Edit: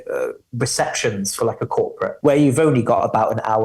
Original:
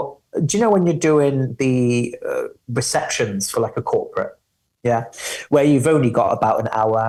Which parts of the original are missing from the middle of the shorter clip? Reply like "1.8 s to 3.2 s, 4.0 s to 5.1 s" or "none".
4.3 s to 5.4 s